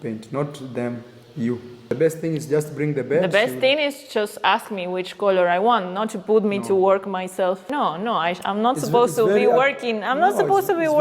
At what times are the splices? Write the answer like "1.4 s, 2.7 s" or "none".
1.9 s, 7.7 s